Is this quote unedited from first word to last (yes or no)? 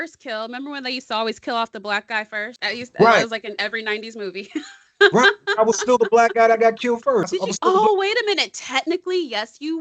no